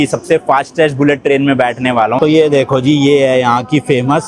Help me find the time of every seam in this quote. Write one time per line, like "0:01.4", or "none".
0:02.2